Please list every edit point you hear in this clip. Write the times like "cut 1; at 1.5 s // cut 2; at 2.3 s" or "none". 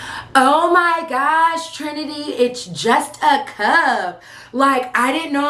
none